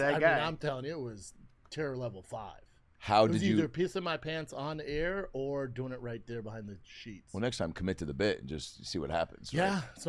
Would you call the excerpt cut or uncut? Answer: uncut